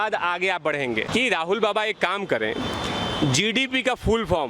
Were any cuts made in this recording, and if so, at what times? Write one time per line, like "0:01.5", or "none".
0:01.1